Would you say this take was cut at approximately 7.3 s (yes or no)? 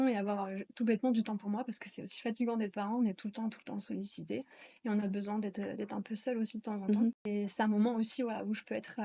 yes